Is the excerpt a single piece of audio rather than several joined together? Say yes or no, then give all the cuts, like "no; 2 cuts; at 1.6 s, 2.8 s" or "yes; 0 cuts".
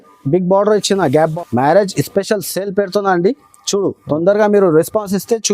no; 1 cut; at 1.3 s